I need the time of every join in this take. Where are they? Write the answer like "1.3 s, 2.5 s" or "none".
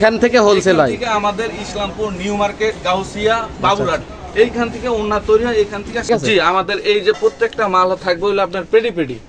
6.1 s